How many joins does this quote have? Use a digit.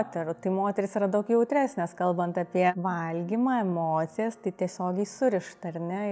1